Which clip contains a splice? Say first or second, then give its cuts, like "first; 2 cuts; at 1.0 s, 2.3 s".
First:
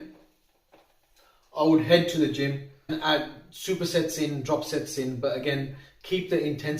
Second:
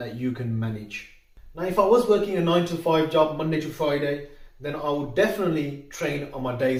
first; 1 cut; at 2.9 s